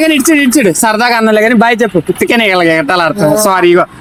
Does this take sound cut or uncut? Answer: uncut